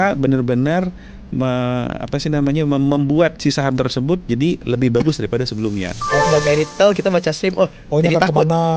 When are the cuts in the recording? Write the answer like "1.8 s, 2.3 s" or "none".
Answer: 6.2 s